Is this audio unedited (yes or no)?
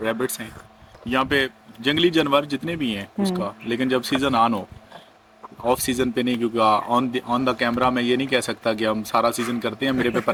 yes